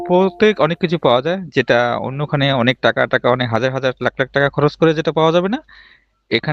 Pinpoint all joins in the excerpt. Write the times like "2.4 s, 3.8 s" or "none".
none

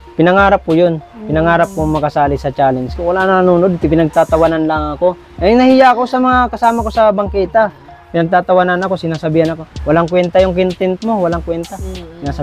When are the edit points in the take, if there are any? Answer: 2.9 s

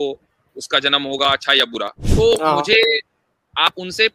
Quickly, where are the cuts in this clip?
2.0 s

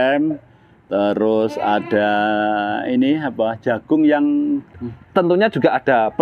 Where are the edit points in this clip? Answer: 4.8 s

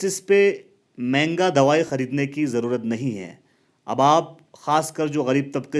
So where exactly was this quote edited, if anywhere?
1.9 s

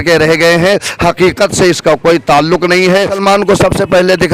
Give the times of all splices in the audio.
3.2 s

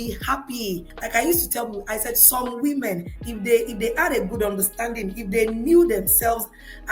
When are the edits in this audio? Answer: 0.9 s

